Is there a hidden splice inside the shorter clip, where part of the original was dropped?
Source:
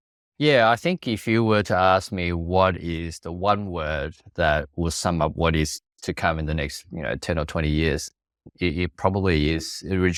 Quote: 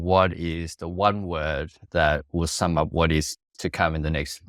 no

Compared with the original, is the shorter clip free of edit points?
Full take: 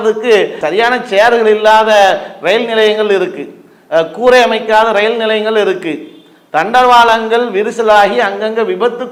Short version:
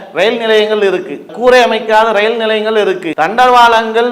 no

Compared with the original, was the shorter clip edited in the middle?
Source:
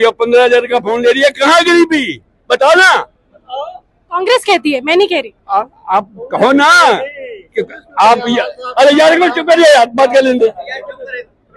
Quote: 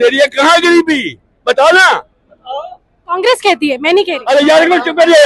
yes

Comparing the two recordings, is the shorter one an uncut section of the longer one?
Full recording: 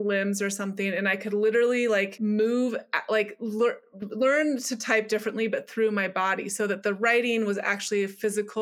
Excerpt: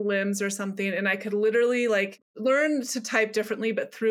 no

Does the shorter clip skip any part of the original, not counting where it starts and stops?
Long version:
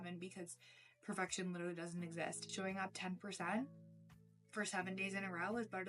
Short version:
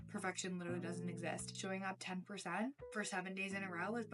yes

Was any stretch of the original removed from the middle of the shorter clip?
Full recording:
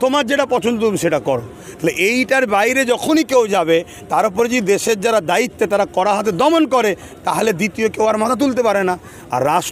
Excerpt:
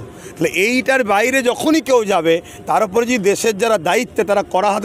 no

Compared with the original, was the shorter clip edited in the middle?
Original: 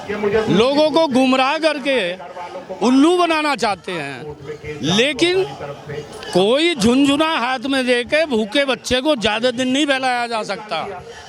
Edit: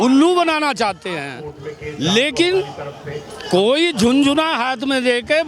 no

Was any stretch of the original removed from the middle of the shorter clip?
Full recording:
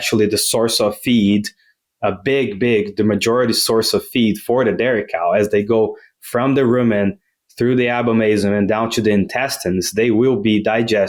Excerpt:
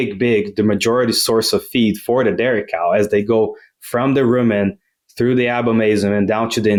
no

